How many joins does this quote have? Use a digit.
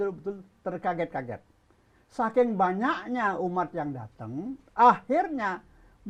0